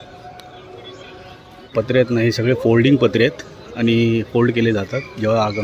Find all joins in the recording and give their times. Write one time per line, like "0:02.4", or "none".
0:01.7